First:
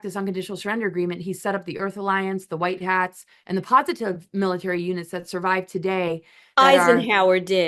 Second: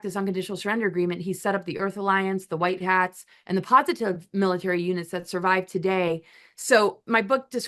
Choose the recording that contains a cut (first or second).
second